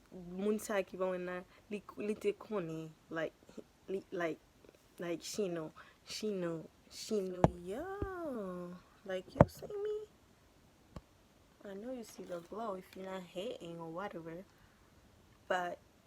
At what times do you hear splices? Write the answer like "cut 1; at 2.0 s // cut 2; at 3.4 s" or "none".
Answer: cut 1; at 7.3 s